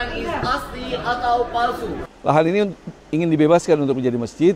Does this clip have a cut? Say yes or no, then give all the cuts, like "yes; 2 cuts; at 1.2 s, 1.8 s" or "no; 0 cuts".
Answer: yes; 1 cut; at 2.0 s